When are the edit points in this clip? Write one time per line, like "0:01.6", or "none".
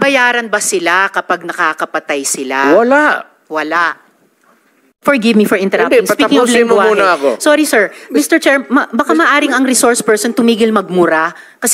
0:04.9